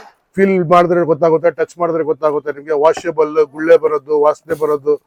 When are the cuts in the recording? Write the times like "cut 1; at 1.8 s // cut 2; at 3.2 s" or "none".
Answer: none